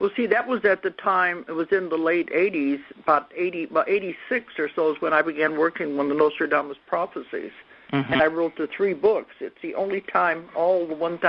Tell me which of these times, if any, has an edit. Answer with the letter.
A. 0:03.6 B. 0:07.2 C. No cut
B